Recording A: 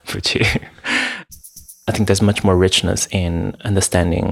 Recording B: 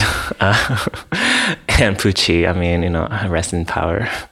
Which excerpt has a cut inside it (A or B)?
A